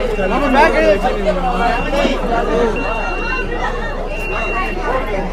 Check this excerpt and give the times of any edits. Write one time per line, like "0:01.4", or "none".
none